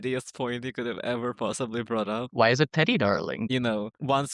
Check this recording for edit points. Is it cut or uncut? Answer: cut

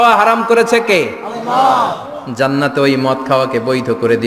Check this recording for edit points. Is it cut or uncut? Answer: uncut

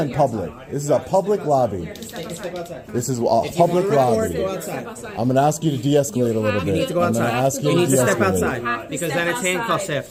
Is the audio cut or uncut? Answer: uncut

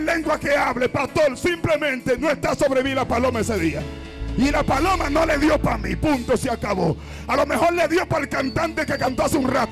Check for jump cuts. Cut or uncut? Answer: uncut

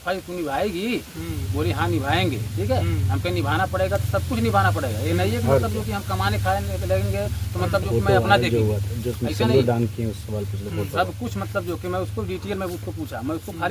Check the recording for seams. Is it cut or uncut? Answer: uncut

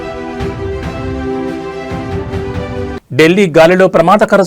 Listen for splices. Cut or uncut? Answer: uncut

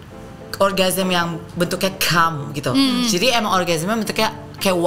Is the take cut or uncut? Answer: uncut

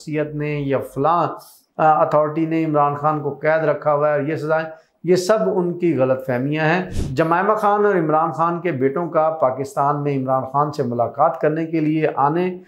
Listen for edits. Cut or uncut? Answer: cut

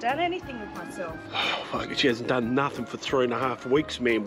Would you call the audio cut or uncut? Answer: uncut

